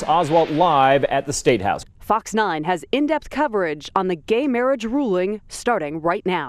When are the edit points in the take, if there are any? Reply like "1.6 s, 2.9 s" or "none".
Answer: 1.8 s